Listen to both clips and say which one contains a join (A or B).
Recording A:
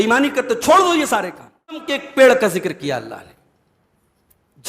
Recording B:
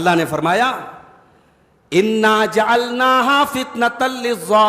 A